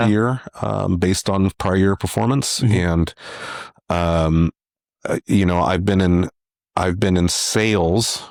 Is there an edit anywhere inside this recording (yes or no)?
no